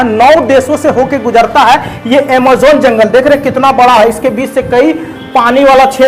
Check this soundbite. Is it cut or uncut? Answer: uncut